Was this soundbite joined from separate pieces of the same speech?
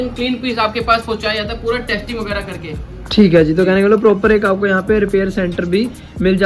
no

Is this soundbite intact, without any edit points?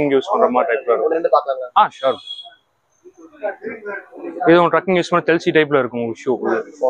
yes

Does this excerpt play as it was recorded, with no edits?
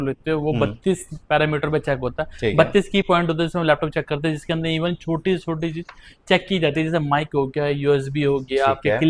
yes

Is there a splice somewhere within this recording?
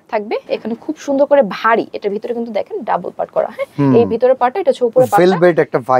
no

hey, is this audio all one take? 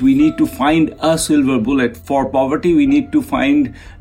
no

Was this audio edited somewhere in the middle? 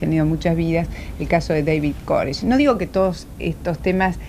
yes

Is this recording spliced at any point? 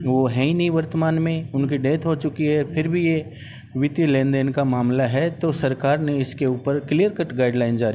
no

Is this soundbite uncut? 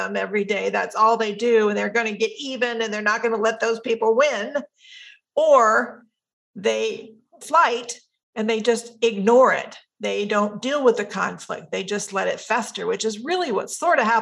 no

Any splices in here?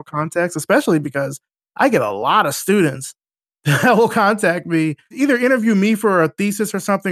yes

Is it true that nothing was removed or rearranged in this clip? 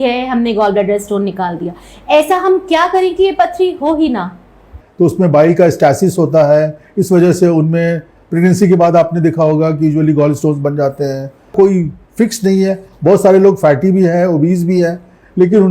no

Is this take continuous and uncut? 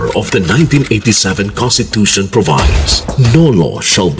yes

